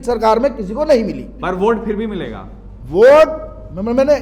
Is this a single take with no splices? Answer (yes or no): no